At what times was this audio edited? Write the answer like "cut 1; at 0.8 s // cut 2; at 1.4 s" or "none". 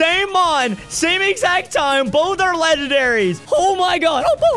cut 1; at 3.4 s